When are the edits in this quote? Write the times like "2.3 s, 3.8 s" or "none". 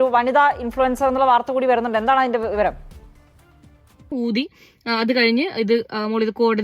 4.1 s